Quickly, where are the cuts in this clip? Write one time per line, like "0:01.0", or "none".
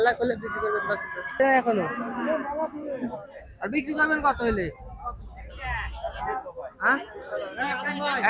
0:01.4